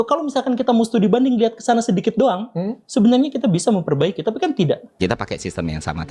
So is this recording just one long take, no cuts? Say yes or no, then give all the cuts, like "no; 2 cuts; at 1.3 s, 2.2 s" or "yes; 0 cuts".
no; 1 cut; at 4.9 s